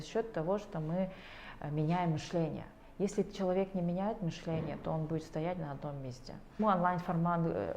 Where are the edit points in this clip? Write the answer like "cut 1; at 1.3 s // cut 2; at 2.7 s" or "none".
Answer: cut 1; at 6.6 s